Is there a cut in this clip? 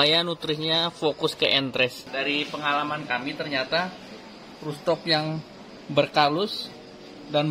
yes; 1 cut; at 2.0 s

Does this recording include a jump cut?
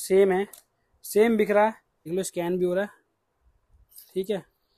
yes; 1 cut; at 2.0 s

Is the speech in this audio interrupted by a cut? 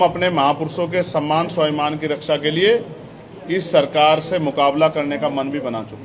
no; 0 cuts

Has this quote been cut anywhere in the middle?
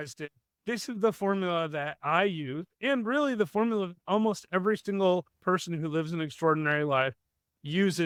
no; 0 cuts

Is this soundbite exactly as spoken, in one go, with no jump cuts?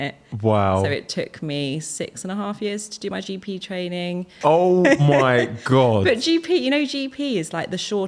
no; 1 cut; at 4.3 s

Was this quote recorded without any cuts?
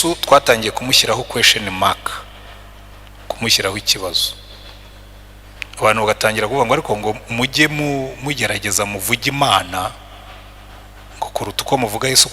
yes; 0 cuts

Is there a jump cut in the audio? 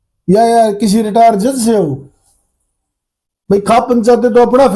no; 0 cuts

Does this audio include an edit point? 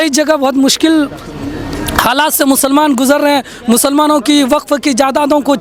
no; 0 cuts

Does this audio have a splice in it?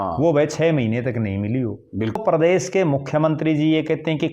yes; 1 cut; at 2.2 s

